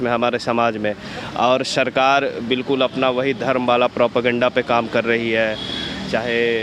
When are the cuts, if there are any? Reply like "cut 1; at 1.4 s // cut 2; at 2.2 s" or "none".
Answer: none